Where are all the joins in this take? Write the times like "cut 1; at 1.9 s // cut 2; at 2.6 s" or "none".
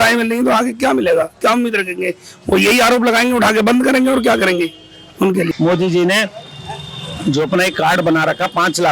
cut 1; at 5.5 s